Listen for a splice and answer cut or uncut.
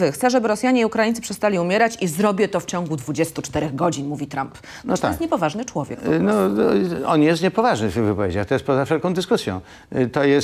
uncut